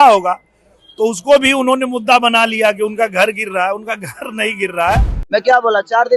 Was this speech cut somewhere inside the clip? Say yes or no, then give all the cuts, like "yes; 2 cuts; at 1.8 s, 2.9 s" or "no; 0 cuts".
yes; 1 cut; at 5.1 s